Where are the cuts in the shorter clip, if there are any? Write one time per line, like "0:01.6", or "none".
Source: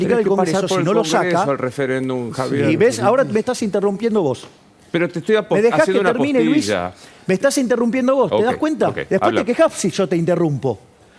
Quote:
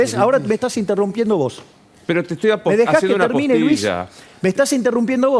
none